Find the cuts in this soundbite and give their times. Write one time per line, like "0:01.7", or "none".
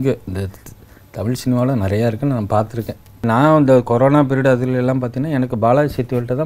0:03.2